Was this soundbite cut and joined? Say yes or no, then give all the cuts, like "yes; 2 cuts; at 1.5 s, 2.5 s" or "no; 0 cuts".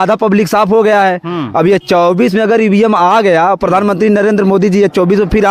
no; 0 cuts